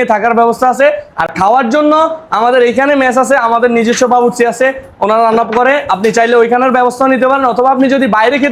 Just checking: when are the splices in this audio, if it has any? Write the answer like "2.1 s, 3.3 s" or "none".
none